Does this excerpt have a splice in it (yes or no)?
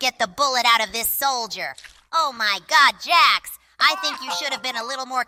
no